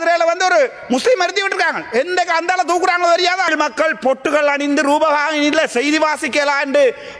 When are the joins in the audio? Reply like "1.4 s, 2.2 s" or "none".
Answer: 3.5 s